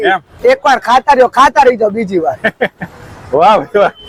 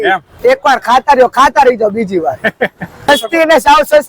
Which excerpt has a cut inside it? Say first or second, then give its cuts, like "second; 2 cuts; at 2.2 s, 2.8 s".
second; 1 cut; at 3.0 s